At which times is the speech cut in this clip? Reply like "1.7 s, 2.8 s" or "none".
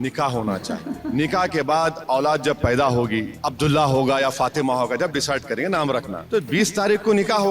1.0 s, 3.3 s, 6.2 s